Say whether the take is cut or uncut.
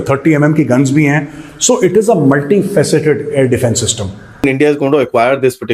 cut